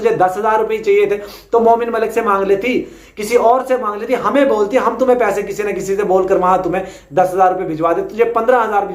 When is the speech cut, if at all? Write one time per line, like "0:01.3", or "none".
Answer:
none

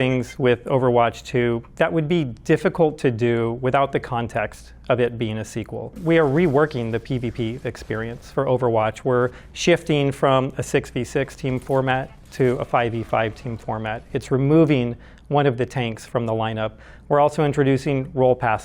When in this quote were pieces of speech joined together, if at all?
0:01.7

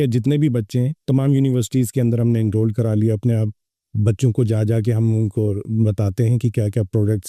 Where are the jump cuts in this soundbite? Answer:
none

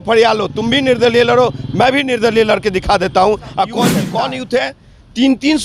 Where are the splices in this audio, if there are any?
0:04.1

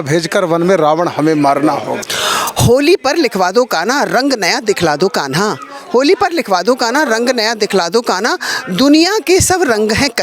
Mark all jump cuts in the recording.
0:01.9

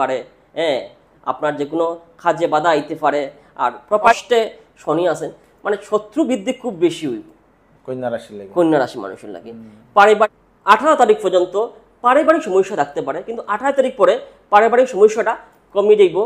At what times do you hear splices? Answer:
0:04.1
0:10.0

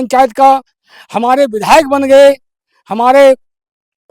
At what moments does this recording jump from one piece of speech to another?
none

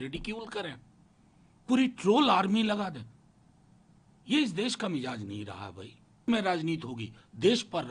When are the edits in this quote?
0:06.2

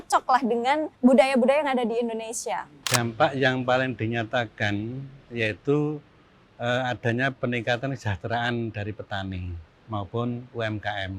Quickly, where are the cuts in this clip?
0:00.9
0:02.7

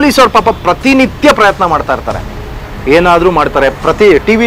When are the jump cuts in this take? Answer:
none

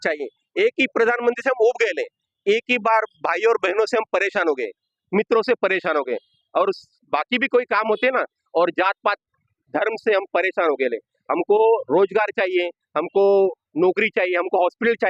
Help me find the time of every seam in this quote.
none

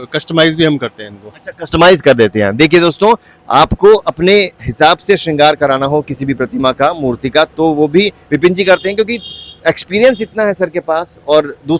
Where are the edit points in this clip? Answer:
none

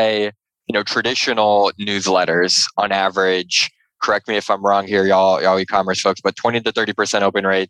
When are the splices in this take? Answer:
0:04.0

